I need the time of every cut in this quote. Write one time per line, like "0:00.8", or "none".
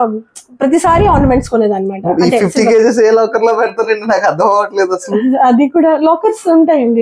none

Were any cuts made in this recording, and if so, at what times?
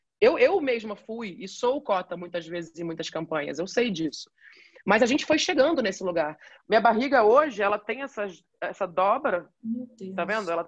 0:06.4

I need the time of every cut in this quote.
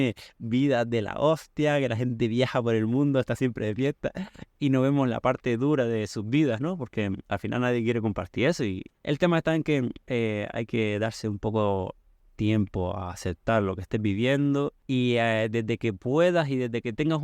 0:08.8
0:10.0

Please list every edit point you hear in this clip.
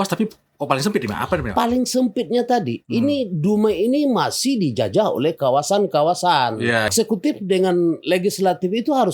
0:06.9

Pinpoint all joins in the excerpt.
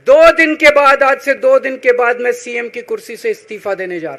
none

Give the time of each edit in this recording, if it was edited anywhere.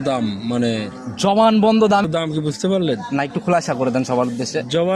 0:02.0

